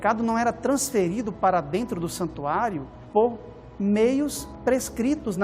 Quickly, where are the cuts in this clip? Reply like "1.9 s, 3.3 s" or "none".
2.9 s, 4.5 s